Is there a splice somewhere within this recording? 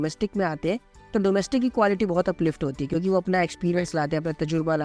no; 0 cuts

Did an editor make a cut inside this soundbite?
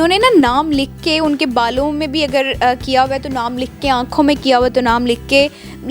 no; 0 cuts

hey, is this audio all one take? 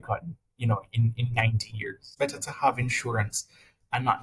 no; 1 cut; at 2.0 s

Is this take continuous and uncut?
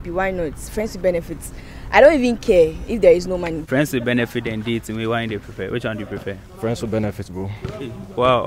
no; 1 cut; at 3.6 s

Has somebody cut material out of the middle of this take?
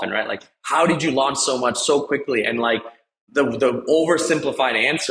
no; 0 cuts

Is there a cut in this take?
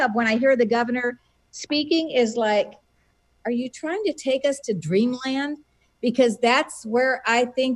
no; 0 cuts

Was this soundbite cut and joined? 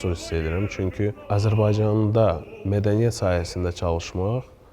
no; 0 cuts

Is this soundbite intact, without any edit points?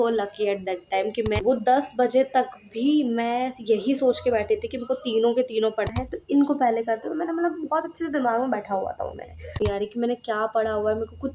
no; 3 cuts; at 1.4 s, 5.9 s, 9.5 s

